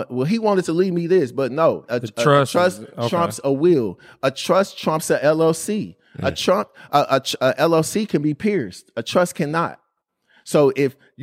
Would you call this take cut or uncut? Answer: cut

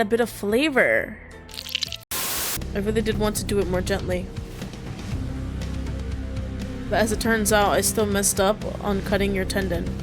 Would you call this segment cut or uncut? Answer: cut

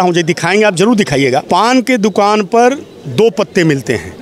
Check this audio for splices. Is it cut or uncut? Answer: cut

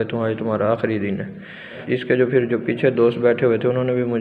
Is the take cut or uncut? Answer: cut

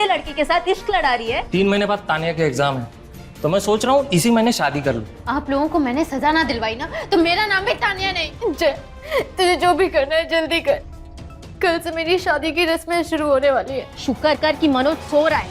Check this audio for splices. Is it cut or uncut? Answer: cut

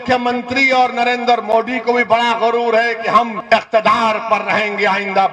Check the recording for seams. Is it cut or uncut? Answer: cut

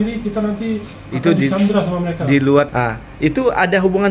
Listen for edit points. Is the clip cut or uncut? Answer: cut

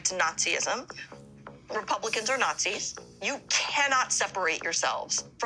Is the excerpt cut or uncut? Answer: cut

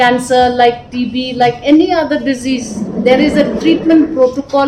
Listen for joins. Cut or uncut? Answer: uncut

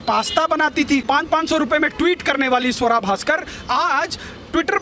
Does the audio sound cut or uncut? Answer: cut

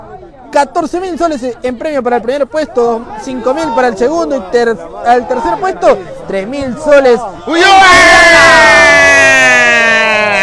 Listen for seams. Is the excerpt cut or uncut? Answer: uncut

